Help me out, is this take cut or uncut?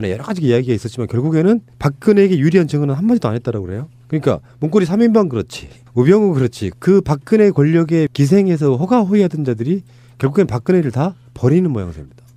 cut